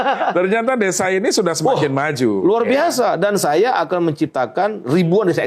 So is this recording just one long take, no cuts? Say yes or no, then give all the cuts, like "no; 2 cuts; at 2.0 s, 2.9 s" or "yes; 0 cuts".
yes; 0 cuts